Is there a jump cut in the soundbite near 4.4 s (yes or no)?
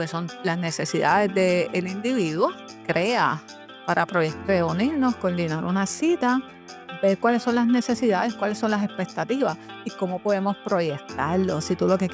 yes